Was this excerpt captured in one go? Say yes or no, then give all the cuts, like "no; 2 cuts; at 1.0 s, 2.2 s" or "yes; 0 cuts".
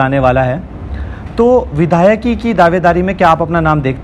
yes; 0 cuts